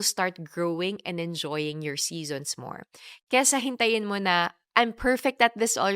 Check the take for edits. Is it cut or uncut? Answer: uncut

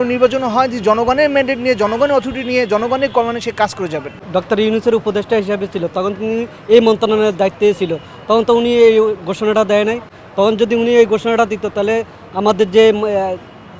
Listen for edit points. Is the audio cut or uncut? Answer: uncut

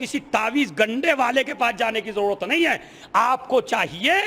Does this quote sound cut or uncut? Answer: uncut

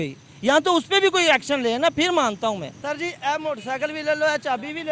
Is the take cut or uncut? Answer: cut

